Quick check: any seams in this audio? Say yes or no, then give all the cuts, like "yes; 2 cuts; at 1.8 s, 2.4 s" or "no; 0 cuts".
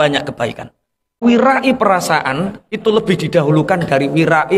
yes; 1 cut; at 1.2 s